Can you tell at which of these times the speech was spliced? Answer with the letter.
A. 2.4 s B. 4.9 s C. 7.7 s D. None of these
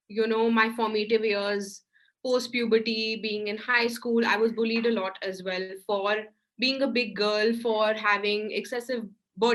D